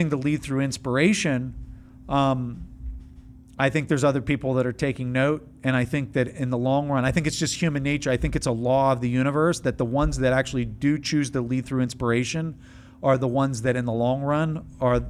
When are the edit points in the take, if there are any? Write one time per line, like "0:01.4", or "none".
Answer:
none

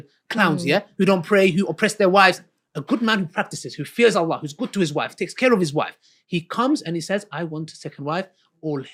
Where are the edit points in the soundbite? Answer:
none

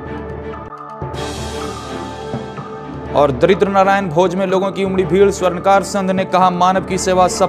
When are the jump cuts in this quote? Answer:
0:02.7

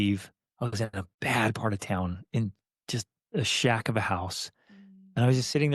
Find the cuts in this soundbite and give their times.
0:01.1

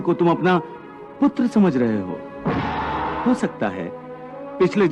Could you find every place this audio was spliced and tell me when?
0:03.2

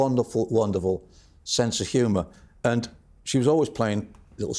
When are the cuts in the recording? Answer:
none

